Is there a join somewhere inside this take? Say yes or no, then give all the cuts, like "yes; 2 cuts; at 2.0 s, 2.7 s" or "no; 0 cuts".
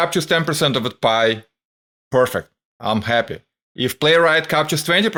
no; 0 cuts